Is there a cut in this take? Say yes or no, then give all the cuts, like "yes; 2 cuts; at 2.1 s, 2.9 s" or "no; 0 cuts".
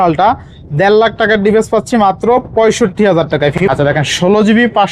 yes; 1 cut; at 3.6 s